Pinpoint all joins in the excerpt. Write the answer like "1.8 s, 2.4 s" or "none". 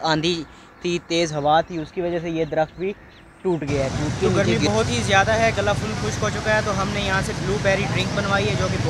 4.5 s